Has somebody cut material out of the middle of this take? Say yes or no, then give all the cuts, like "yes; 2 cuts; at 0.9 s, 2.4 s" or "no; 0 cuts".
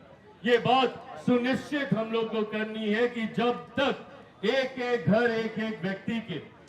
no; 0 cuts